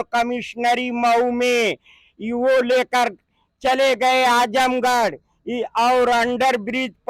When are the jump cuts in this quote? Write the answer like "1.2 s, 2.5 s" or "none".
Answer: none

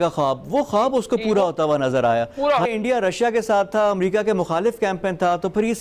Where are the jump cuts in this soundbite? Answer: 2.7 s

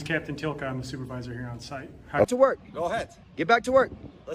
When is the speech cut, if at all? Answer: 2.3 s

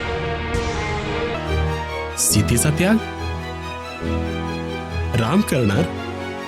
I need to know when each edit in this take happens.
1.3 s

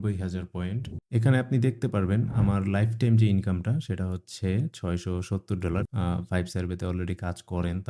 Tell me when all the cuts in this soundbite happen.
1.0 s, 5.9 s

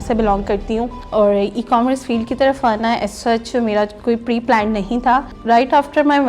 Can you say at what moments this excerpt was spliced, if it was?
1.0 s, 5.3 s

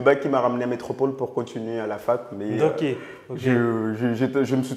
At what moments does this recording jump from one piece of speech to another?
none

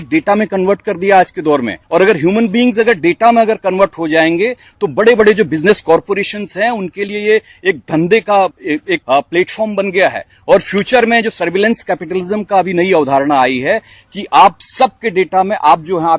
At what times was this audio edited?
1.8 s, 8.6 s

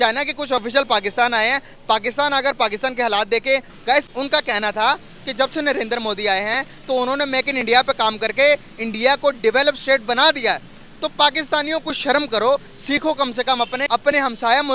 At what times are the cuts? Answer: 3.7 s

